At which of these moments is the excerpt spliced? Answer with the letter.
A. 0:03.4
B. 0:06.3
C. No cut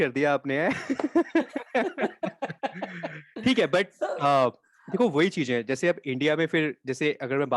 C